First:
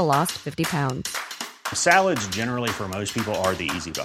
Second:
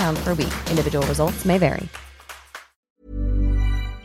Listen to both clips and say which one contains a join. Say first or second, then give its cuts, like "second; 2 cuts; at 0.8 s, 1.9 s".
second; 1 cut; at 3.0 s